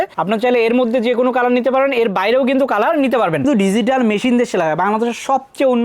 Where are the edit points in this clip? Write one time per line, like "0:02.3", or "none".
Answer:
0:03.4